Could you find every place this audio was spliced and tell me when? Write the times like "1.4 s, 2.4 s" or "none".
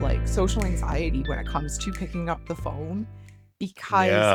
none